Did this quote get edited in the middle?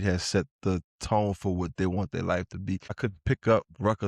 yes; 1 cut; at 3.0 s

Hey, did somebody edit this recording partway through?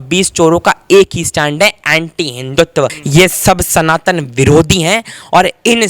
yes; 1 cut; at 3.0 s

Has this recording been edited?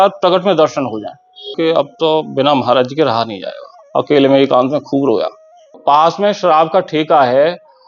yes; 2 cuts; at 1.6 s, 5.7 s

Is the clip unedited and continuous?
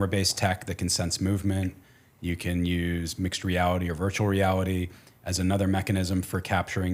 yes; 0 cuts

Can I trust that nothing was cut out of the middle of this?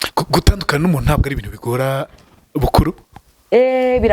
yes; 0 cuts

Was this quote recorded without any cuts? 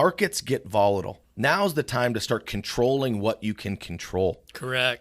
no; 1 cut; at 1.2 s

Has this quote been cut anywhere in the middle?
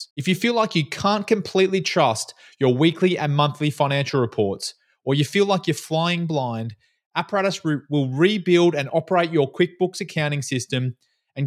no; 0 cuts

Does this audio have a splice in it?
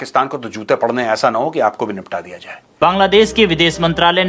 yes; 1 cut; at 2.7 s

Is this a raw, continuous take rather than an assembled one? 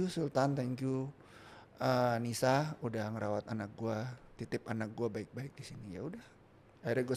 yes; 0 cuts

